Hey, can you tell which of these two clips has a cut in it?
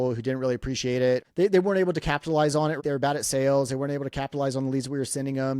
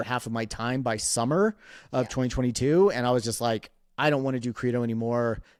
first; 2 cuts; at 1.2 s, 2.8 s

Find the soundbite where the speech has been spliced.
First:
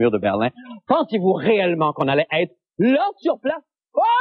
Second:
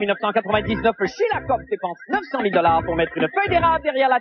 first; 1 cut; at 3.1 s

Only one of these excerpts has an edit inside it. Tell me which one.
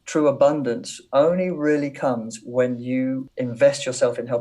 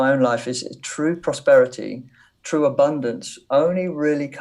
first; 1 cut; at 3.3 s

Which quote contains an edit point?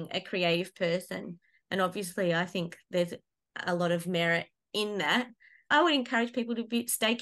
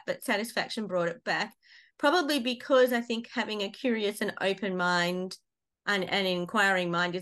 first; 1 cut; at 5.7 s

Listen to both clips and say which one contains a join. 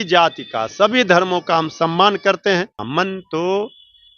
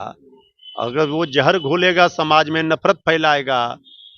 first; 1 cut; at 2.8 s

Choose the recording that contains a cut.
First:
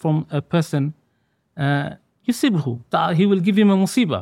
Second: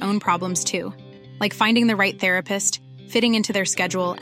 first; 1 cut; at 2.8 s

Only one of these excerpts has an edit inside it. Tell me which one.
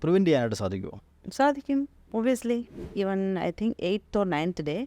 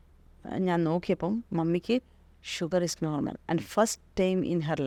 first; 1 cut; at 2.8 s

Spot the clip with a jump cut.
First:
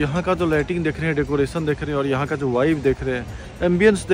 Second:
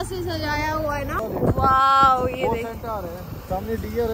second; 1 cut; at 1.1 s

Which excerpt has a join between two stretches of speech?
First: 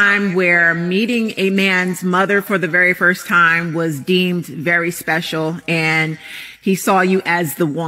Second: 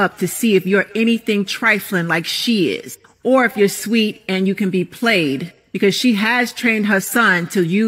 first; 1 cut; at 5.7 s

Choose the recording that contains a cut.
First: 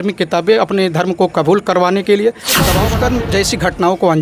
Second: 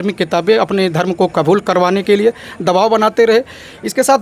first; 1 cut; at 2.8 s

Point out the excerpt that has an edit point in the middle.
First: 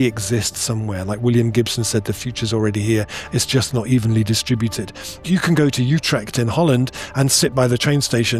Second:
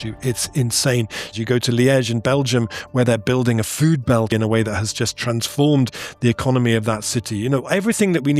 second; 2 cuts; at 1.3 s, 4.3 s

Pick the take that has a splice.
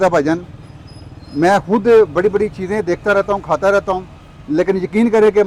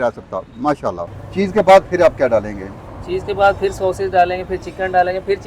second; 1 cut; at 1.1 s

